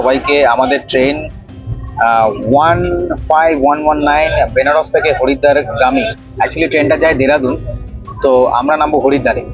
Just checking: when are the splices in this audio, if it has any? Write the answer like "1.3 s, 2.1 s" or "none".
none